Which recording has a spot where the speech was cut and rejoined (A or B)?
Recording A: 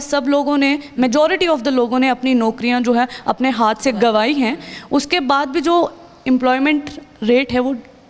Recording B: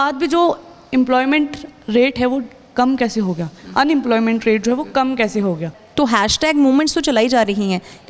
B